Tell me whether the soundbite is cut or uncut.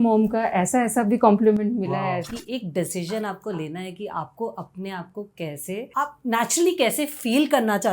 cut